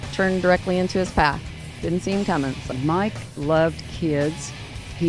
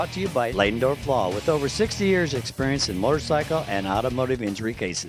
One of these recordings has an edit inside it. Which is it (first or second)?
first